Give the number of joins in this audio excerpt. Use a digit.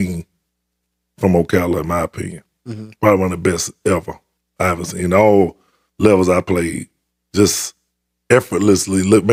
0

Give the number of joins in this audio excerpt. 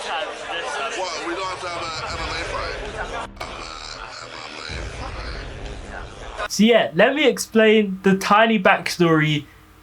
1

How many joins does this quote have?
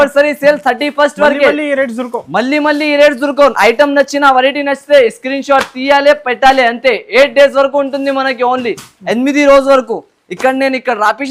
0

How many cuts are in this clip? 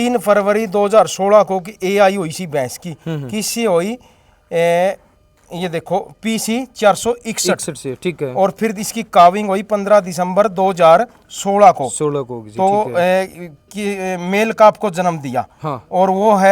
0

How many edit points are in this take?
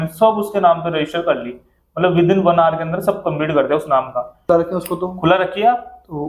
1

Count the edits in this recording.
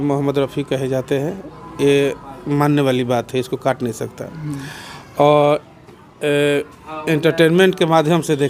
0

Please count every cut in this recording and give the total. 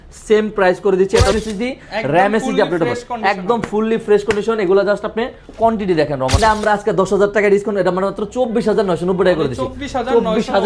2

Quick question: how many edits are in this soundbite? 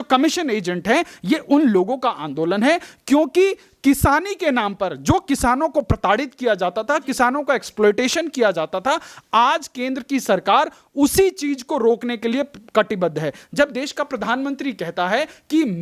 0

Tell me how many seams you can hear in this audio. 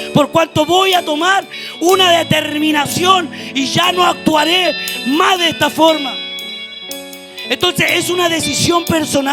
0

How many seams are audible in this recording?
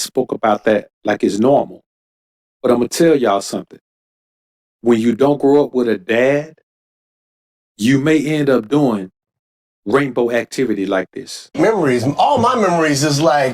1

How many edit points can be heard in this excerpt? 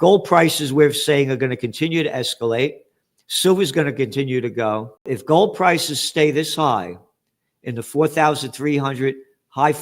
1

